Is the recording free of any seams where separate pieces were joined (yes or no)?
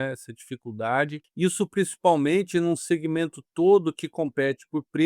no